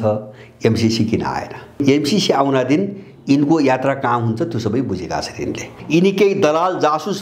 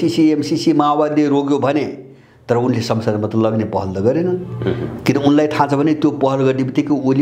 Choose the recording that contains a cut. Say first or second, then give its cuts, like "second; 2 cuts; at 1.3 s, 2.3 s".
first; 2 cuts; at 1.8 s, 5.7 s